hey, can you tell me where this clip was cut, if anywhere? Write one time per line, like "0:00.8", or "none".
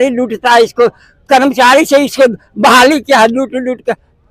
none